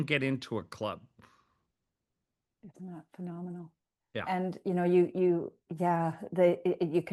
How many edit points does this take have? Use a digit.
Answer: 0